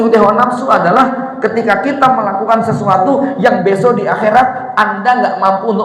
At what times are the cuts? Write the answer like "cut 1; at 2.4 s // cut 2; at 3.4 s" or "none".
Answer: none